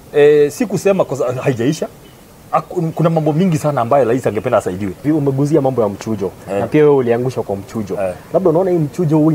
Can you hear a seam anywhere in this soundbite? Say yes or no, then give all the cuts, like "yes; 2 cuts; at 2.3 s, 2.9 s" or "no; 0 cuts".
yes; 1 cut; at 5.0 s